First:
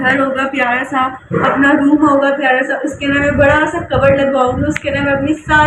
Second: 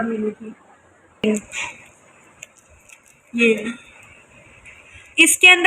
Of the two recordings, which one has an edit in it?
second; 1 cut; at 1.2 s

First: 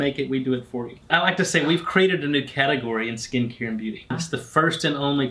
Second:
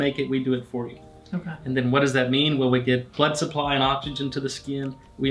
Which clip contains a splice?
first; 2 cuts; at 1.1 s, 4.1 s

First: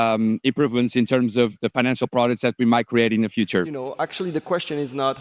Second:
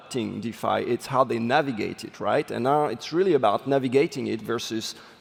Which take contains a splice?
first; 1 cut; at 3.8 s

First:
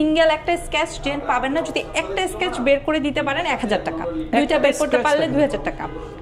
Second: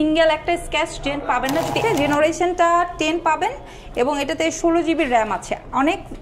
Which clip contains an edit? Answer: second; 1 cut; at 1.8 s

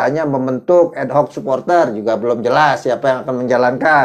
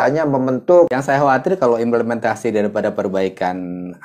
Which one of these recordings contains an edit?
second; 1 cut; at 0.9 s

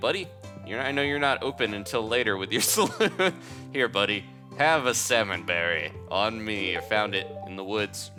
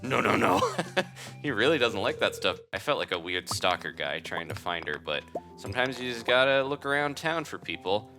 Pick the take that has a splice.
second; 1 cut; at 2.8 s

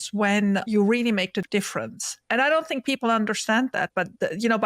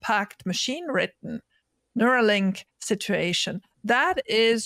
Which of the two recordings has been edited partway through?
first; 1 cut; at 1.4 s

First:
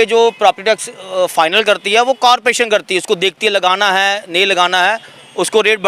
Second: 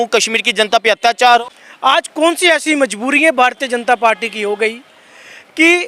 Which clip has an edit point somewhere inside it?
second; 1 cut; at 1.6 s

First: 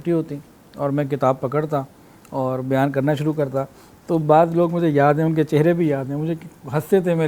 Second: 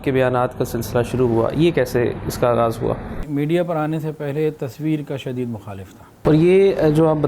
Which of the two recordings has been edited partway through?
second; 2 cuts; at 3.2 s, 6.1 s

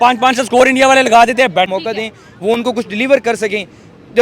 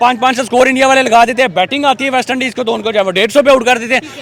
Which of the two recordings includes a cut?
first; 1 cut; at 1.7 s

